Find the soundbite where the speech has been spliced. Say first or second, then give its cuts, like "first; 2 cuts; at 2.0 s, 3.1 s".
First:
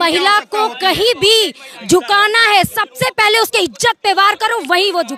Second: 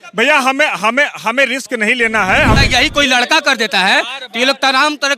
second; 1 cut; at 2.6 s